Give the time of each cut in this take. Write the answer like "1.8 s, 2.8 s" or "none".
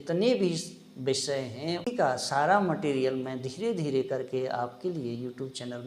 1.9 s